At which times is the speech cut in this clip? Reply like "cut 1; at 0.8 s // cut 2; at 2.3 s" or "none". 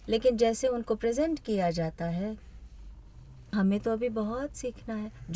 cut 1; at 3.5 s